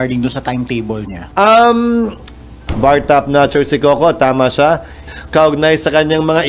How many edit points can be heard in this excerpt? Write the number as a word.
three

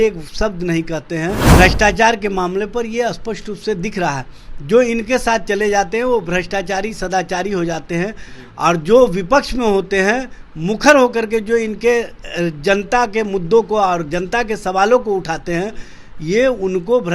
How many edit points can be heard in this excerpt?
one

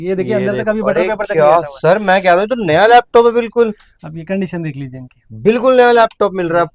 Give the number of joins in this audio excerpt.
zero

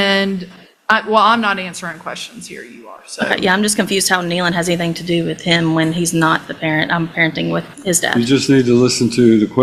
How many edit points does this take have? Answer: zero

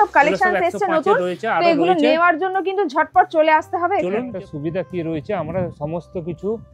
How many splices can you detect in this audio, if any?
one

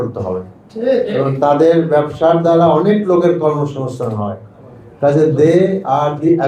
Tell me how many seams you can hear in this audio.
zero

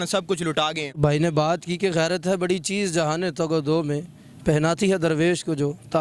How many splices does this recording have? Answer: one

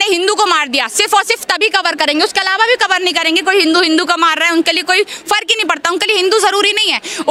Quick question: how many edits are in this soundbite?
zero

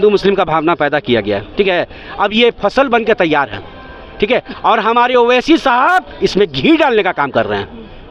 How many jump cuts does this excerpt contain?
zero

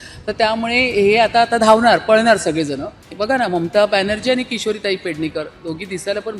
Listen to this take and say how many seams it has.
one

